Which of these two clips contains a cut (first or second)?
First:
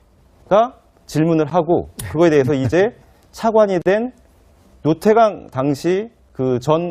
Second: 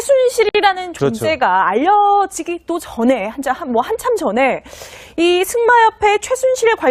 first